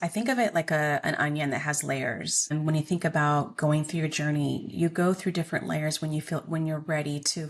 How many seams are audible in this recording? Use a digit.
1